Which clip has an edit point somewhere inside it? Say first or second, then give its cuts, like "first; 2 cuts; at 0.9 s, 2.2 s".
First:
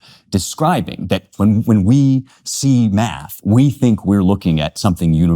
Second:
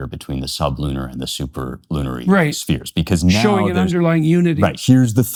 first; 1 cut; at 1.3 s